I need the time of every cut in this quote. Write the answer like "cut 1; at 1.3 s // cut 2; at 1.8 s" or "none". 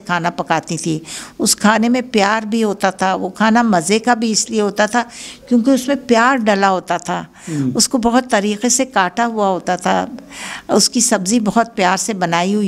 none